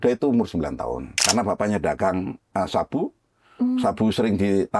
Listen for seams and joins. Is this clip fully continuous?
no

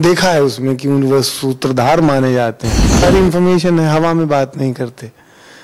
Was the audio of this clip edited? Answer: yes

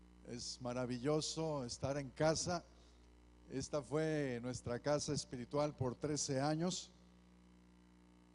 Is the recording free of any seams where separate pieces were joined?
yes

